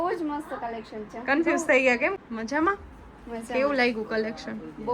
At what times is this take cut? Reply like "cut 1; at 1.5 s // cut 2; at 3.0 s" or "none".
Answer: cut 1; at 2.2 s